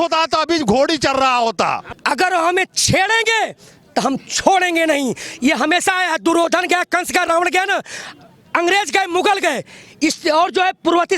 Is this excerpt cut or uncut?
cut